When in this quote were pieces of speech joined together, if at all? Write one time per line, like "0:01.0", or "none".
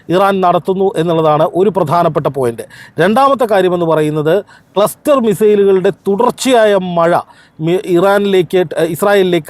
none